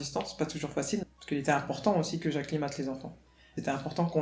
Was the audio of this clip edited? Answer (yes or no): yes